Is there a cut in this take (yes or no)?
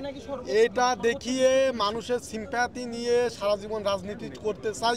no